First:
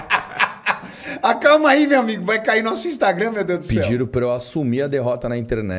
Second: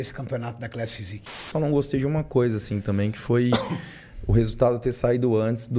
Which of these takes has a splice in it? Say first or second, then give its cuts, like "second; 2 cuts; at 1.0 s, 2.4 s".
second; 1 cut; at 1.5 s